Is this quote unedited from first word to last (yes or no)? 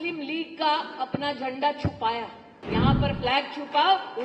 no